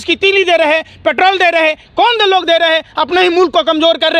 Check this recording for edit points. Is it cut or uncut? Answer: uncut